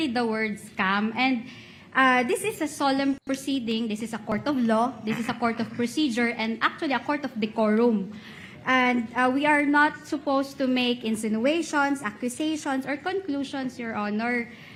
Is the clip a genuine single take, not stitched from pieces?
yes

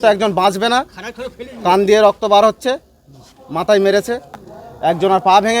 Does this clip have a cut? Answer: yes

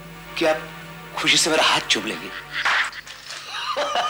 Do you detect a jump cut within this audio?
yes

